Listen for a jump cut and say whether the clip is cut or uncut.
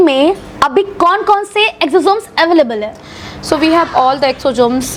uncut